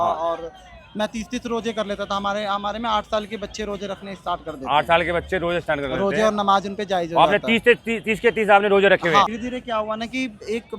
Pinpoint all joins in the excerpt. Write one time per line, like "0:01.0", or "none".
0:09.3